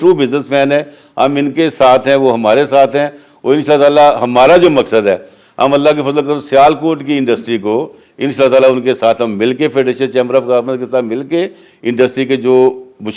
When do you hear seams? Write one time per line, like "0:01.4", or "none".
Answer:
none

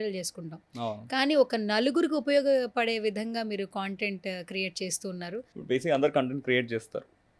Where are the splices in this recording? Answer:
0:05.5

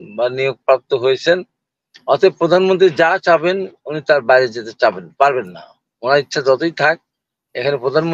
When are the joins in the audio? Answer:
none

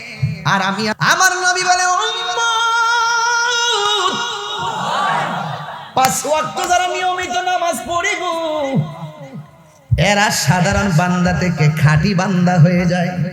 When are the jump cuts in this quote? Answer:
0:00.9

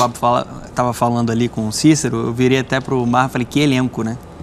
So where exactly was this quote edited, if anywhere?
none

